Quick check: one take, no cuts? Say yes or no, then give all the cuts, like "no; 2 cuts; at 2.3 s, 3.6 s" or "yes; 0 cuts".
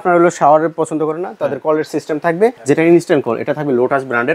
no; 1 cut; at 2.6 s